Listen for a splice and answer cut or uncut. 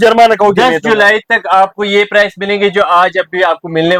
uncut